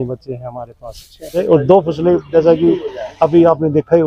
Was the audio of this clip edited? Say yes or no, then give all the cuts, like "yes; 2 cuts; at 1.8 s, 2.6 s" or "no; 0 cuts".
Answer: yes; 1 cut; at 1.4 s